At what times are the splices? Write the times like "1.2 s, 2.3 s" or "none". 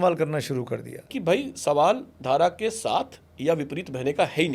1.1 s